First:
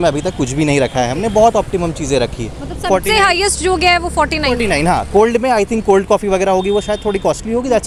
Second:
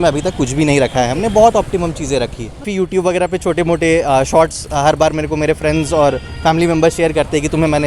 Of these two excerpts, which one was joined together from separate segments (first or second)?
second